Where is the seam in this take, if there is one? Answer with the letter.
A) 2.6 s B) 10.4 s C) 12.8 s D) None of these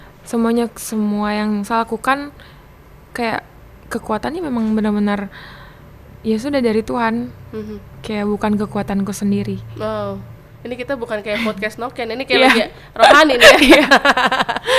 D